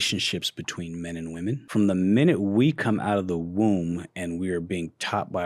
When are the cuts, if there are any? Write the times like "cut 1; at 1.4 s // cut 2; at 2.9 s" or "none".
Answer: cut 1; at 1.6 s